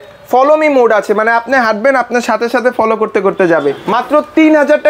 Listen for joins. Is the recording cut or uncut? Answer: cut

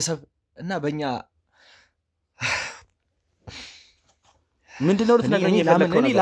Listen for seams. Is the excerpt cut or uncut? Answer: uncut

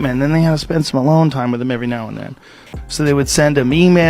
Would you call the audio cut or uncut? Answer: cut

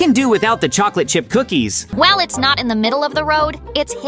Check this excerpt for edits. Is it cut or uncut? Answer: cut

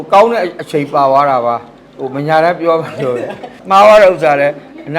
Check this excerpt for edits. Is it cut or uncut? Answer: cut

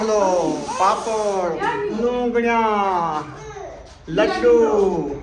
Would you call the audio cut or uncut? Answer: cut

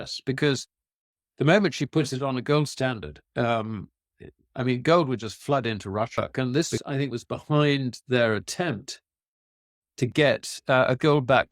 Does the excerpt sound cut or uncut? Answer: cut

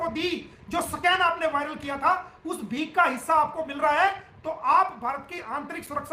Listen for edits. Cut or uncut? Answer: uncut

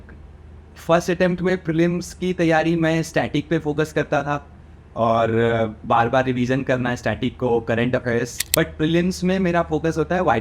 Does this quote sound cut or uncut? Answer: cut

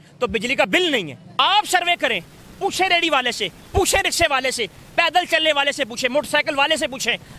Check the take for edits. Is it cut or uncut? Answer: cut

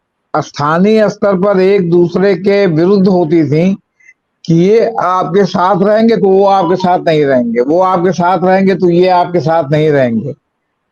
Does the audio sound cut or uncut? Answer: uncut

